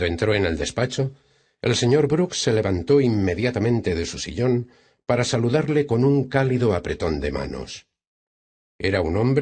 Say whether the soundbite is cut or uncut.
cut